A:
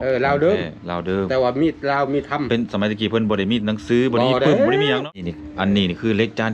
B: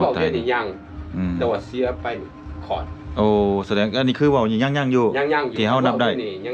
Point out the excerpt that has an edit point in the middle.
A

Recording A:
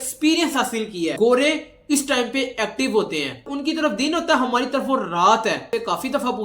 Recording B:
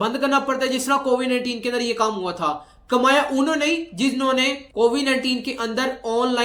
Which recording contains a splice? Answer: A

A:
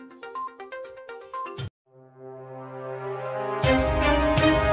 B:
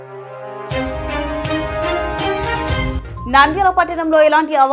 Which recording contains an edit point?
B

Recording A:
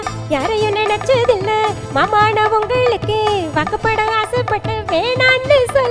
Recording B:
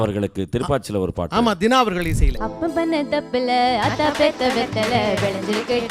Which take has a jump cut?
B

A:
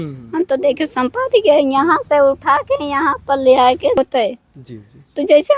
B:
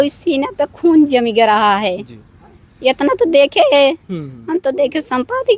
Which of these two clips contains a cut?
A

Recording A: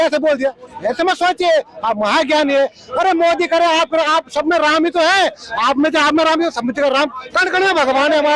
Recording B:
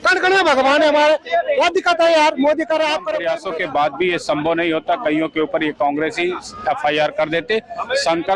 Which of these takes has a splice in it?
B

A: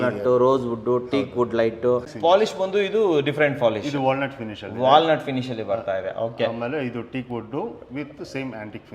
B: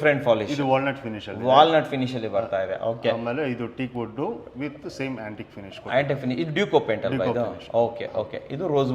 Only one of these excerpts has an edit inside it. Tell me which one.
A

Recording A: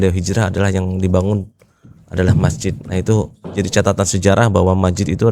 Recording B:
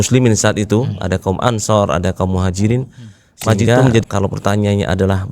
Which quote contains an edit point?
B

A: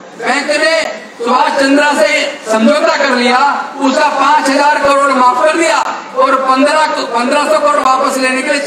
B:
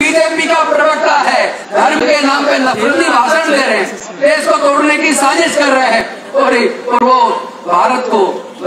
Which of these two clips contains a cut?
B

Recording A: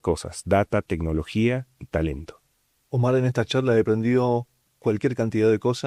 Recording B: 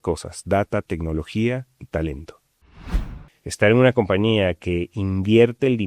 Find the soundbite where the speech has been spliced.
B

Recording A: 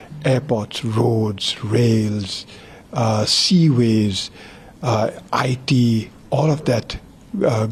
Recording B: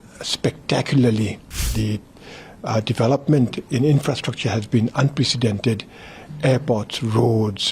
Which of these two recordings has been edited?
B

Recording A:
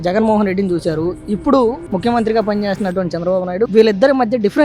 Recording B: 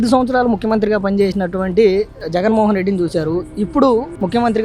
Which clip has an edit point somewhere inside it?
A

